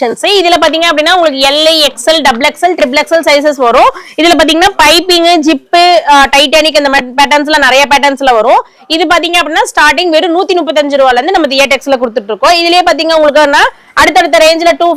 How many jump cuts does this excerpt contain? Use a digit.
0